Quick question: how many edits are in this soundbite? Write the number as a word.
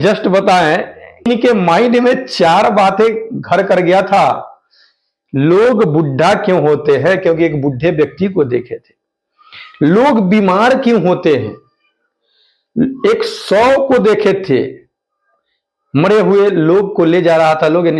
one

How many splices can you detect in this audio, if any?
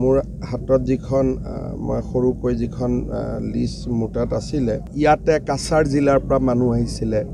one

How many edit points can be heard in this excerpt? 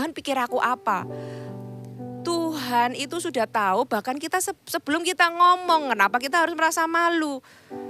zero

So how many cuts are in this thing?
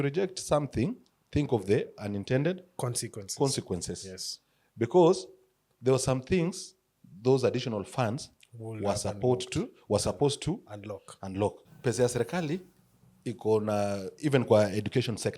one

